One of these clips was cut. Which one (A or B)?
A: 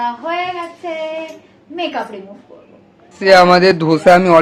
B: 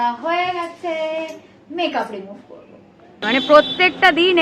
B